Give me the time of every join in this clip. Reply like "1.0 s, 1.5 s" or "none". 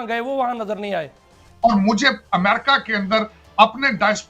1.2 s